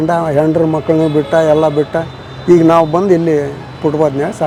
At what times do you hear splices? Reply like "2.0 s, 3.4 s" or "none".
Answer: none